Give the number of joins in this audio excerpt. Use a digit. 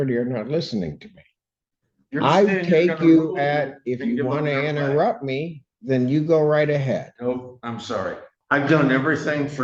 1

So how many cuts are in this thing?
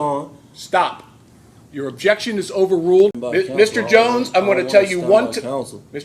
1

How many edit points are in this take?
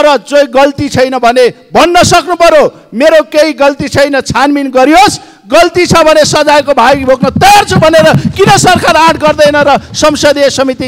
0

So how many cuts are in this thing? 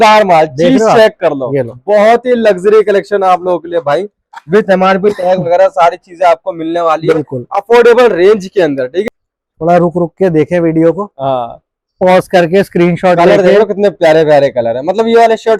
1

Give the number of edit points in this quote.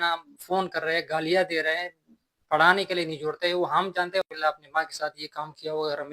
1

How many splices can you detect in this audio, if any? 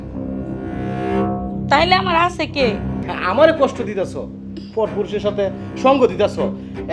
1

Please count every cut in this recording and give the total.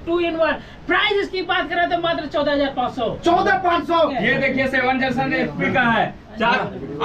1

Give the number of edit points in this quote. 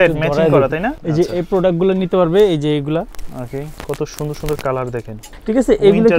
3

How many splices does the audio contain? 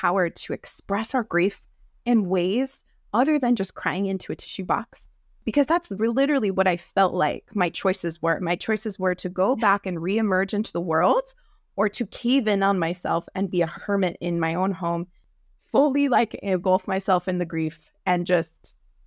2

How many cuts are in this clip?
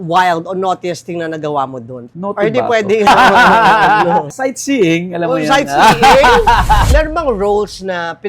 3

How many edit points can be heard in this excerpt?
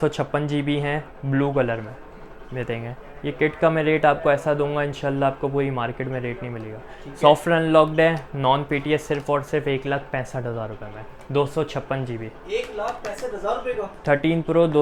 0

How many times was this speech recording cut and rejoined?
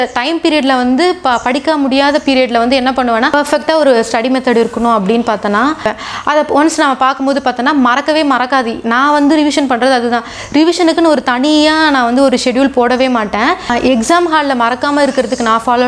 3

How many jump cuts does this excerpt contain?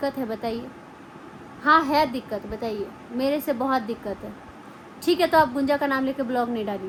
0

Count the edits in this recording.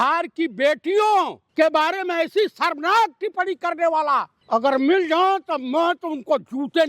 2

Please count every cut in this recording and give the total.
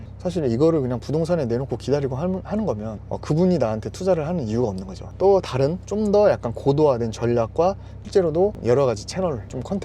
2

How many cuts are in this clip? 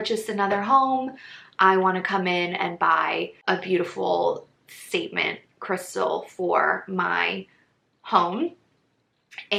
0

